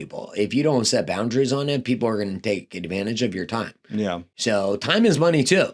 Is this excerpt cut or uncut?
uncut